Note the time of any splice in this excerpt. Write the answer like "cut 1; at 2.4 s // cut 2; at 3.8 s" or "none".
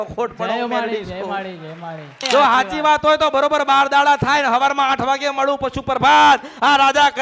cut 1; at 2.2 s